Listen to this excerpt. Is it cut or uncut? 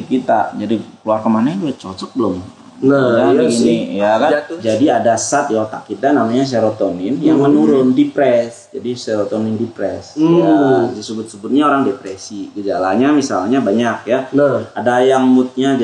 cut